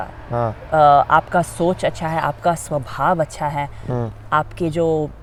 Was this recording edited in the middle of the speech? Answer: no; 0 cuts

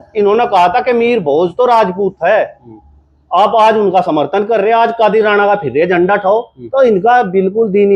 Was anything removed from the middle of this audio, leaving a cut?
no; 0 cuts

